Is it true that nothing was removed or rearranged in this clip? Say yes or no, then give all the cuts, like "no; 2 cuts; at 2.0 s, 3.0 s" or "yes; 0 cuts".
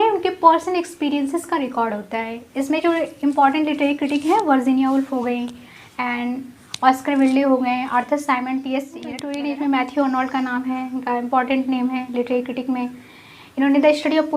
no; 1 cut; at 9.2 s